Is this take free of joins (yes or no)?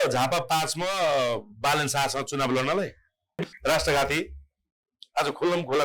no